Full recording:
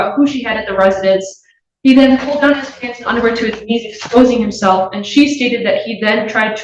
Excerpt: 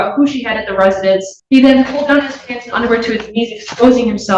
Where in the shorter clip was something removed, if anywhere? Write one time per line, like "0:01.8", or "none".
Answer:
0:01.3